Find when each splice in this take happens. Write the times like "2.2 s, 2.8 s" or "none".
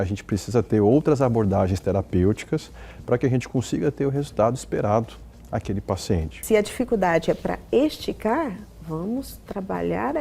6.3 s